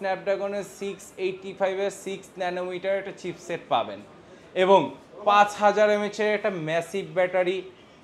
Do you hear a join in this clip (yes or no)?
no